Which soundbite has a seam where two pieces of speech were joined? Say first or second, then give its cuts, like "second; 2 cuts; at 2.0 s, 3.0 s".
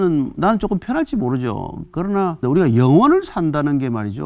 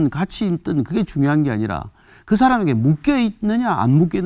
first; 1 cut; at 2.4 s